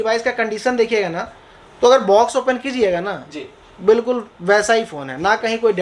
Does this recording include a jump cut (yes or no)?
no